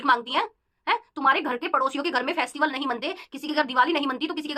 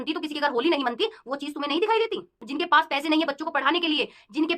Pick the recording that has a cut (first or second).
second